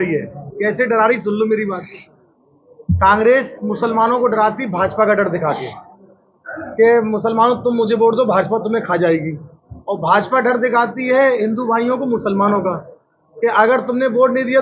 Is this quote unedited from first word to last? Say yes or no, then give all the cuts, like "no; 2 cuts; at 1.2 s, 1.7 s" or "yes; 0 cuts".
yes; 0 cuts